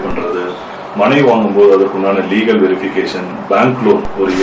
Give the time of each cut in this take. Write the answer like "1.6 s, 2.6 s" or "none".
none